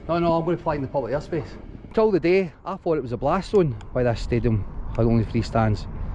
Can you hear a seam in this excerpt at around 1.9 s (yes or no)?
yes